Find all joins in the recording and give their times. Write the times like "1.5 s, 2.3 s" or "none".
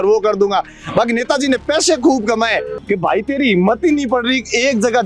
2.7 s